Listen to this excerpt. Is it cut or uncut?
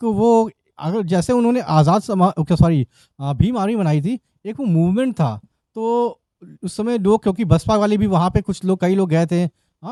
uncut